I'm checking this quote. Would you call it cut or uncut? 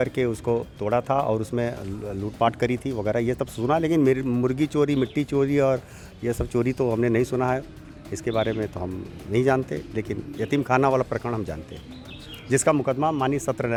uncut